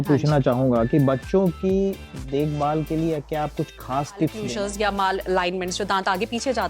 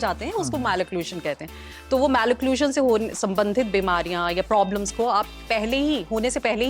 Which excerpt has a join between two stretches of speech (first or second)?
first